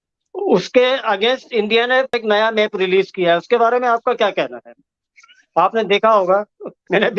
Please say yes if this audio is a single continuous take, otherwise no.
yes